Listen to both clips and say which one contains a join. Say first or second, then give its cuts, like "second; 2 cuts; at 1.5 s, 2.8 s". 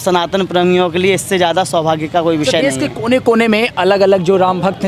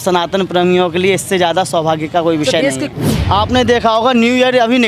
second; 1 cut; at 2.9 s